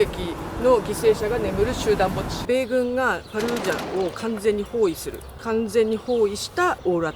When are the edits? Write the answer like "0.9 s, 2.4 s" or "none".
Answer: 2.4 s